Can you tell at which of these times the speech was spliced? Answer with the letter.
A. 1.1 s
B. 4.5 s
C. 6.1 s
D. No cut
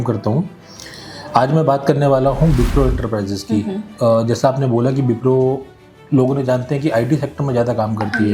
D